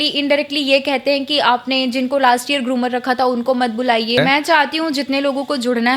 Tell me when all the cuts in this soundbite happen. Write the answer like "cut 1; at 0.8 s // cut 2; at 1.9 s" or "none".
cut 1; at 4.2 s